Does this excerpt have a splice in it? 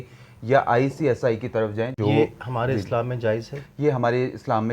yes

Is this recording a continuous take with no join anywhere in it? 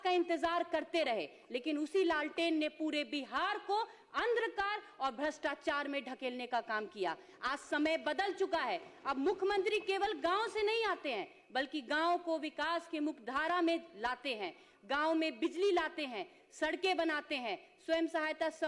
yes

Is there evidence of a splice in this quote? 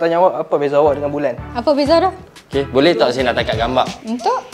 yes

